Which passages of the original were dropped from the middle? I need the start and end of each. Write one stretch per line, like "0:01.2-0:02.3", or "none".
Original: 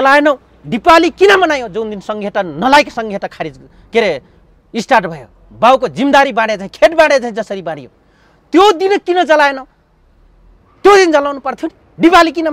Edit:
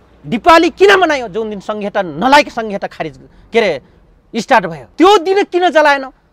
0:05.2-0:08.3